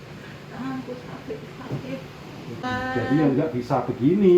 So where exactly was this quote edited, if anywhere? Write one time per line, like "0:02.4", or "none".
0:02.6